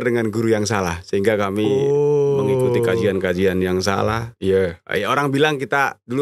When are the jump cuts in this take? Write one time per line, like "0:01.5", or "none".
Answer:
none